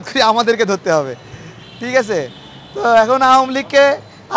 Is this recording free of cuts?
yes; 0 cuts

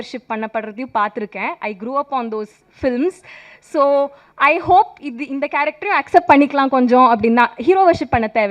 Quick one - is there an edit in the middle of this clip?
no; 0 cuts

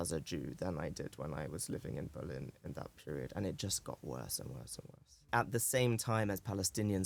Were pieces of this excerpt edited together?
yes; 1 cut; at 5.3 s

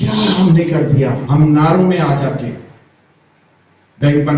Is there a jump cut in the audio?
yes; 1 cut; at 1.2 s

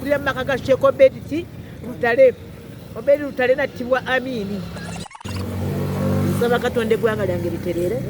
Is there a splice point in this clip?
yes; 1 cut; at 5.2 s

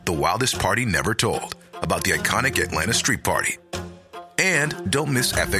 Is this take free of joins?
yes; 0 cuts

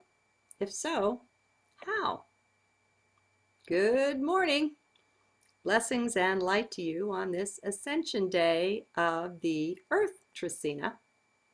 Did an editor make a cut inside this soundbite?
yes; 1 cut; at 5.5 s

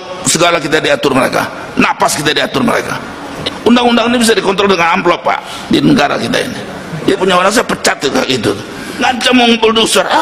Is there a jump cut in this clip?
yes; 3 cuts; at 3.4 s, 7.2 s, 8.9 s

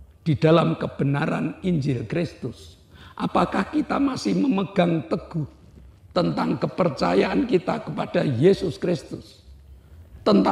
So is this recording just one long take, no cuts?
yes; 0 cuts

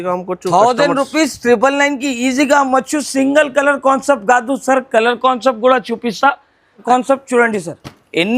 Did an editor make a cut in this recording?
yes; 1 cut; at 6.8 s

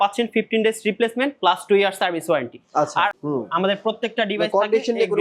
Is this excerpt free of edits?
no; 1 cut; at 3.2 s

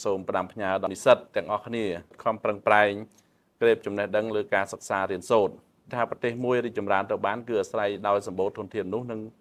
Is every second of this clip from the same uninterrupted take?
no; 3 cuts; at 0.9 s, 2.1 s, 5.9 s

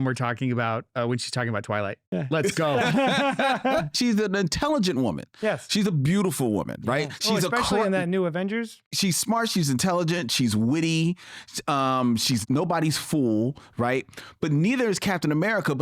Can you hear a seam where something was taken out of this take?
yes; 3 cuts; at 3.9 s, 8.9 s, 12.4 s

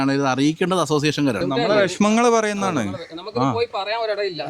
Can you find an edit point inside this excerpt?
yes; 1 cut; at 1.4 s

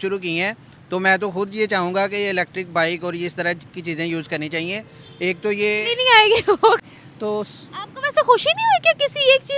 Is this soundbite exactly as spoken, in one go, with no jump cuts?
no; 1 cut; at 6.8 s

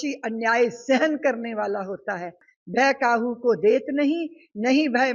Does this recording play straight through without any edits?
no; 1 cut; at 2.5 s

